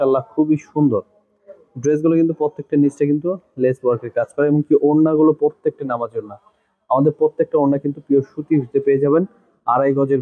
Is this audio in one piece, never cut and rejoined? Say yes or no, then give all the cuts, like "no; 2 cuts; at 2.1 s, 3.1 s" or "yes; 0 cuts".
yes; 0 cuts